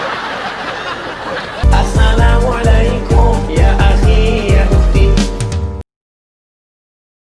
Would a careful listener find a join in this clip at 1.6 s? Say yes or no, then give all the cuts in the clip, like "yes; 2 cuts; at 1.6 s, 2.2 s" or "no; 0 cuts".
yes; 1 cut; at 1.6 s